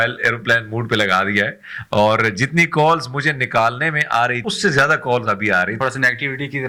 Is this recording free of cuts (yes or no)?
no